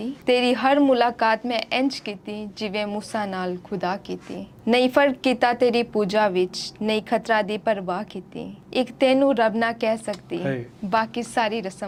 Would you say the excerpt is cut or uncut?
uncut